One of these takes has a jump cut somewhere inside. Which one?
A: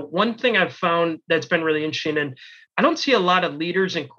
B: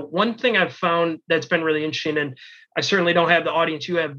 A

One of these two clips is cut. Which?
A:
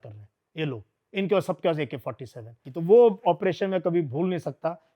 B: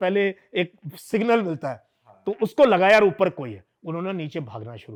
A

